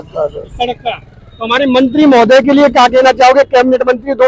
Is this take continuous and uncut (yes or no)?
yes